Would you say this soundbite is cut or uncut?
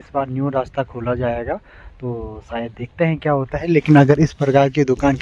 uncut